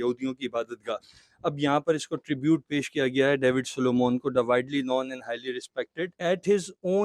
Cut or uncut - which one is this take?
uncut